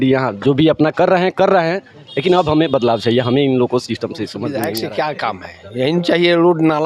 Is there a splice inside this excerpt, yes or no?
yes